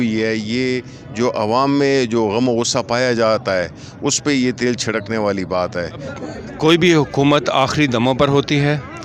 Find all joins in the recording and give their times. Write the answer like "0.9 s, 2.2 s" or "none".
6.1 s